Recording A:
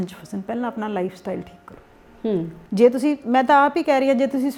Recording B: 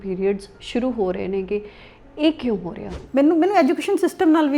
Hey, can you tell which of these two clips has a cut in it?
B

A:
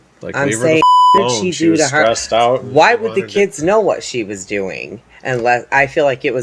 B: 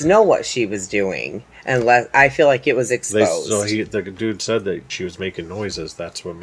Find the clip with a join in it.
B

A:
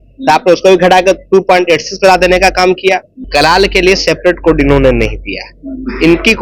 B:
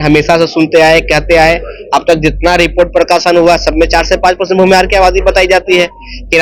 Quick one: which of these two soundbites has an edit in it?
A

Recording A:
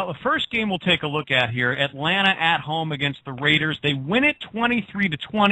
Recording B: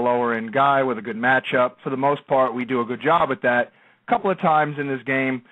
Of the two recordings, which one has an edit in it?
B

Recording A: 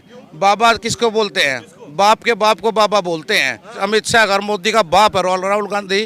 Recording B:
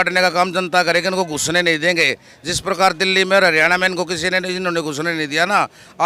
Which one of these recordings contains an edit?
A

